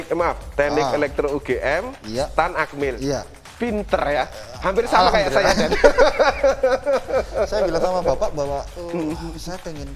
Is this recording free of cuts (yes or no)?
yes